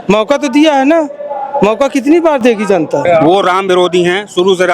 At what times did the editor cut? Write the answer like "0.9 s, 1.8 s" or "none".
3.1 s